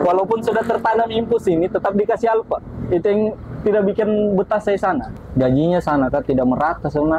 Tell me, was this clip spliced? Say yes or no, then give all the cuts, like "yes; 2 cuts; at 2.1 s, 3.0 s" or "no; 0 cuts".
yes; 1 cut; at 5.1 s